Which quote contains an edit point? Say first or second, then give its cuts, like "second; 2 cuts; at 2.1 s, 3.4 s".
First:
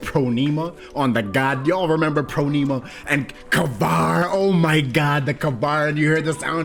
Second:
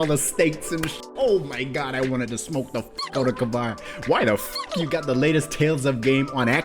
second; 1 cut; at 3.8 s